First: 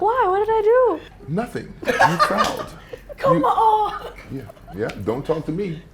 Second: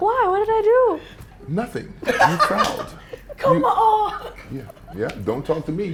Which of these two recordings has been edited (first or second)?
first